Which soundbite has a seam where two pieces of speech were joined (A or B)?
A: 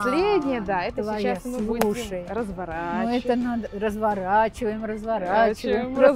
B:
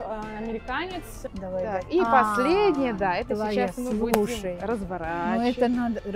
B